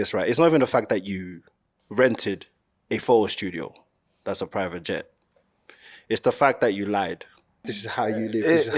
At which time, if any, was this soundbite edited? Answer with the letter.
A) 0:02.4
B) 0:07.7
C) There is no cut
C